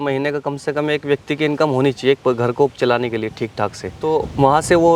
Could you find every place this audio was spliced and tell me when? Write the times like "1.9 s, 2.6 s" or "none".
none

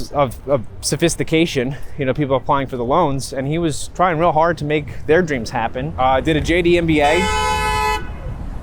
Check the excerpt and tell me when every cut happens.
5.9 s

